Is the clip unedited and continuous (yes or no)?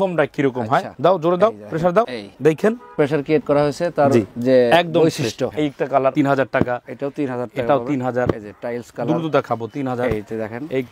no